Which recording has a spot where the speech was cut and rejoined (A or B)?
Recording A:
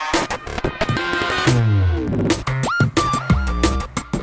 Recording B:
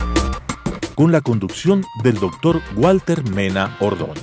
A